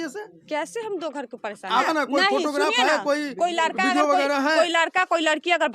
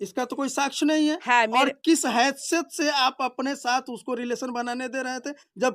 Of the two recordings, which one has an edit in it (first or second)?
first